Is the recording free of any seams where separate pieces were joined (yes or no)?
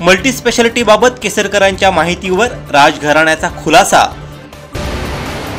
no